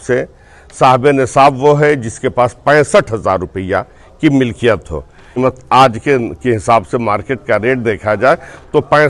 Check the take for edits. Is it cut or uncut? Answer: uncut